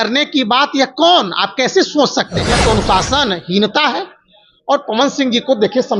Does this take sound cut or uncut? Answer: cut